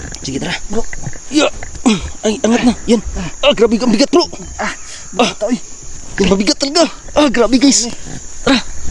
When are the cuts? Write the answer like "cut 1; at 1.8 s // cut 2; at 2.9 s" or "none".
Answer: none